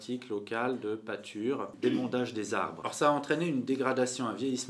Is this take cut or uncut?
cut